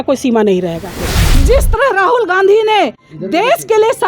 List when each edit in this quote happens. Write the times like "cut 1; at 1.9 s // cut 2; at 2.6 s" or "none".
cut 1; at 1.3 s